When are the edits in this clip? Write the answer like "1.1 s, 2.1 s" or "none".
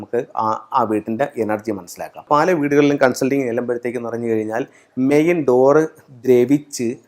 2.3 s